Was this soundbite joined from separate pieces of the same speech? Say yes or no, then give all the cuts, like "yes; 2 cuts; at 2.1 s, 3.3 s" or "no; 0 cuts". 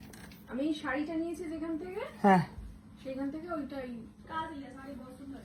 no; 0 cuts